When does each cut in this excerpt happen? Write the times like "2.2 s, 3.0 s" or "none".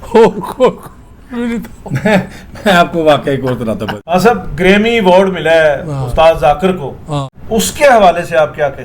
3.9 s, 7.3 s